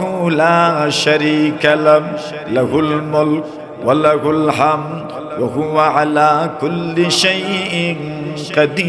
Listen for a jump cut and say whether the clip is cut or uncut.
uncut